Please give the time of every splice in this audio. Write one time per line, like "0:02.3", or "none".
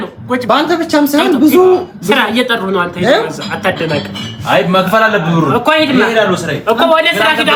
none